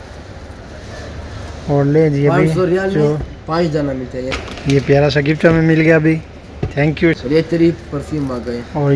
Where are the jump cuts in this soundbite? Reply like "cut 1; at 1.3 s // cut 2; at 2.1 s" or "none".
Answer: cut 1; at 4.3 s // cut 2; at 7.2 s